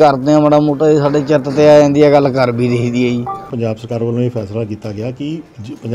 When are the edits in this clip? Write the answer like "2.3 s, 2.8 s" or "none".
3.5 s